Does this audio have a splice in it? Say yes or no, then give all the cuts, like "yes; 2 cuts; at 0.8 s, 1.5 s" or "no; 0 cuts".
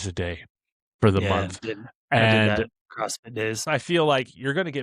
yes; 2 cuts; at 1.6 s, 3.6 s